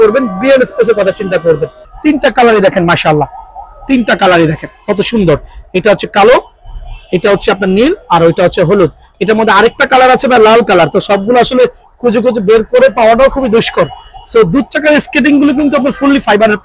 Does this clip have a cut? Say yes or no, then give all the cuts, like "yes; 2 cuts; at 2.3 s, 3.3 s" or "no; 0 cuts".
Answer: yes; 1 cut; at 1.9 s